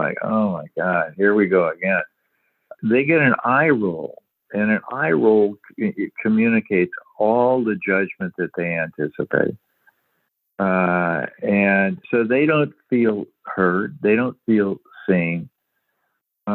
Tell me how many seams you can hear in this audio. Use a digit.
0